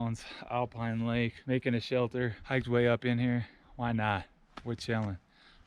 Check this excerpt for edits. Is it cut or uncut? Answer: cut